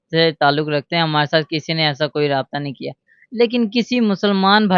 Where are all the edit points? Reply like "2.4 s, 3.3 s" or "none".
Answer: none